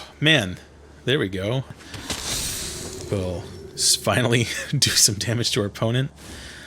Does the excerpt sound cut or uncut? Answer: cut